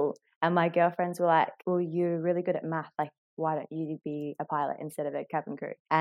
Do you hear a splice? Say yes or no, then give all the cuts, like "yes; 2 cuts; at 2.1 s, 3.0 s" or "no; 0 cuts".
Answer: no; 0 cuts